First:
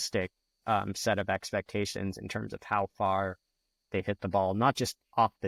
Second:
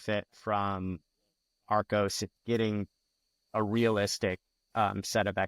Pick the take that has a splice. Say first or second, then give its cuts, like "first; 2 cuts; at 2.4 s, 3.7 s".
second; 1 cut; at 2.4 s